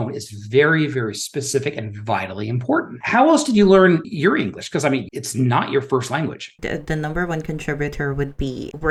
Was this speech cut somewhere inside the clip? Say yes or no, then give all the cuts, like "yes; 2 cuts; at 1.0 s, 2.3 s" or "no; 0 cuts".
no; 0 cuts